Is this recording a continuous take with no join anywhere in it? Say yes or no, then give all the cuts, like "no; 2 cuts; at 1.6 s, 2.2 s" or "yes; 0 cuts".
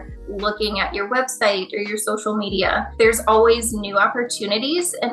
no; 1 cut; at 2.9 s